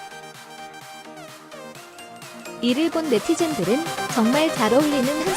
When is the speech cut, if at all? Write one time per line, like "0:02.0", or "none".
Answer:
0:02.6